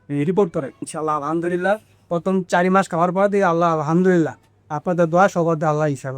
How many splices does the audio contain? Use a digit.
1